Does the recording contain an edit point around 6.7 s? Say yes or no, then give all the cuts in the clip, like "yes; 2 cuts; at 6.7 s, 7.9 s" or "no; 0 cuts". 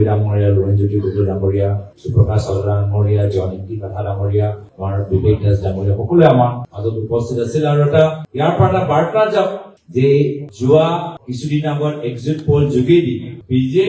no; 0 cuts